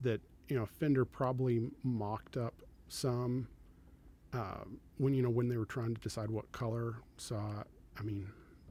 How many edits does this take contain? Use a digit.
0